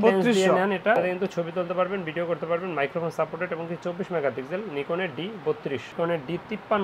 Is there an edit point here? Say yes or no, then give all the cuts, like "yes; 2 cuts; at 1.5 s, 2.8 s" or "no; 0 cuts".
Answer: yes; 2 cuts; at 1.0 s, 5.9 s